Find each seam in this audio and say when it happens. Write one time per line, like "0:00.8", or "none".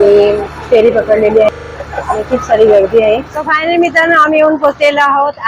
0:03.3